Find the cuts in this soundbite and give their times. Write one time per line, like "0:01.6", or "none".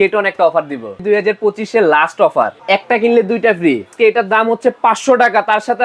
0:01.0
0:02.6
0:03.9